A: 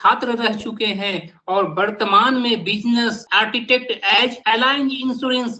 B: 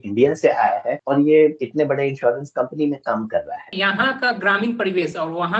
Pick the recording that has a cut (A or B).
B